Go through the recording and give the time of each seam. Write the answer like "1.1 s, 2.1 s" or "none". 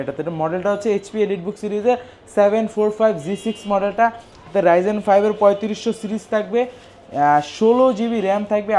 none